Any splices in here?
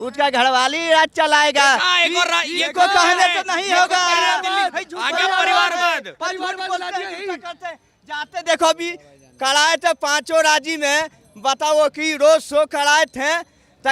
no; 0 cuts

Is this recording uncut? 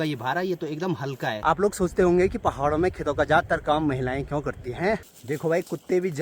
no; 2 cuts; at 1.4 s, 5.0 s

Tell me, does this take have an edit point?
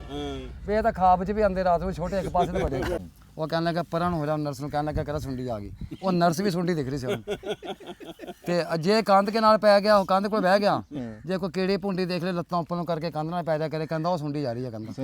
yes; 1 cut; at 3.0 s

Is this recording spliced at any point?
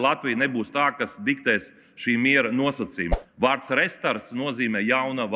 yes; 1 cut; at 3.1 s

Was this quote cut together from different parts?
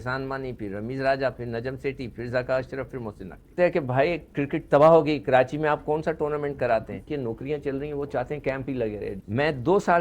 yes; 3 cuts; at 3.5 s, 7.0 s, 9.1 s

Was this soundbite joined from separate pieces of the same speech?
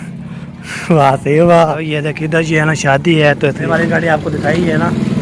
yes; 2 cuts; at 1.9 s, 3.7 s

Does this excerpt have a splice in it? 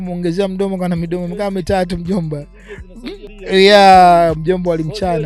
yes; 1 cut; at 3.3 s

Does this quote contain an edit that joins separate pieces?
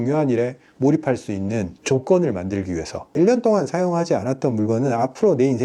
yes; 1 cut; at 3.0 s

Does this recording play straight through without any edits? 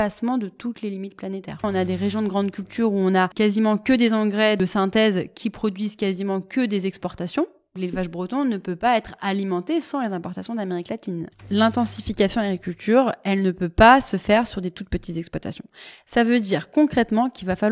no; 4 cuts; at 1.6 s, 4.6 s, 7.8 s, 11.4 s

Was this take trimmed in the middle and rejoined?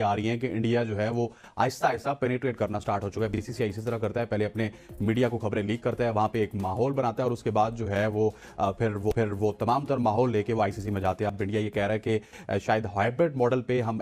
no; 0 cuts

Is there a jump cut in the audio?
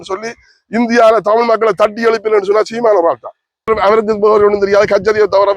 yes; 1 cut; at 3.7 s

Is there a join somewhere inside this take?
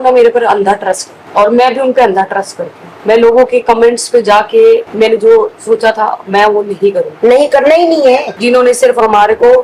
yes; 1 cut; at 8.3 s

